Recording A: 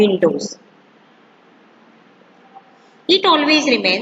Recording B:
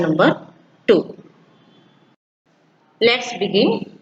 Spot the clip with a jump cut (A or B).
B